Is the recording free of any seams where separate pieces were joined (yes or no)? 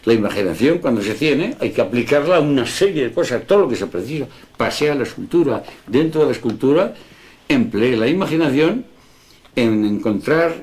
no